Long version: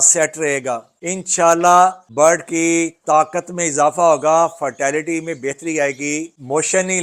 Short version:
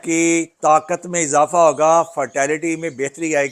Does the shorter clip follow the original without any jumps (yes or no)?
yes